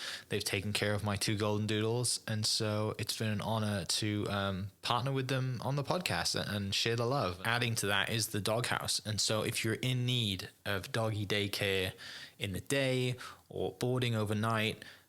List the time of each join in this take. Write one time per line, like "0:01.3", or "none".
0:07.4